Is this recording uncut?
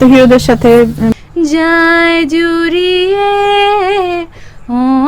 no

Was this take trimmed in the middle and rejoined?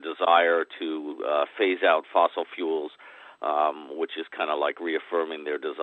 no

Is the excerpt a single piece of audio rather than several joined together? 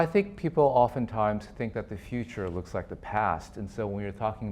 yes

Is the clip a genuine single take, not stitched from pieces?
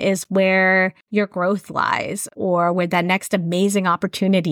no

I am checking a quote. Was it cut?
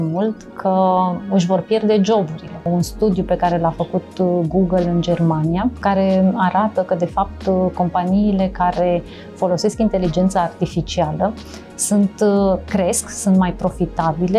yes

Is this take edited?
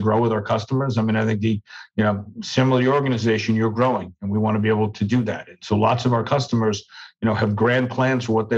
no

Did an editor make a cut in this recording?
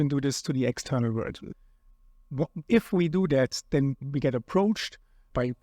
yes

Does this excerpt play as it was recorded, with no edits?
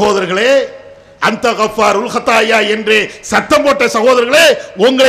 yes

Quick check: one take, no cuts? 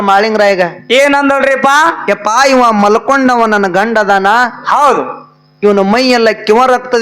yes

